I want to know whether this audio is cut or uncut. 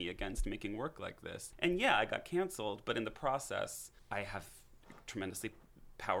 cut